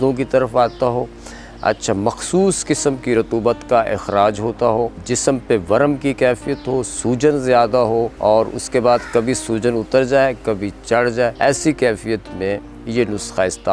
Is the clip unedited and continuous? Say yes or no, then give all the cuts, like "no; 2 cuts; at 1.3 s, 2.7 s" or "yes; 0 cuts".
no; 3 cuts; at 5.0 s, 8.1 s, 11.3 s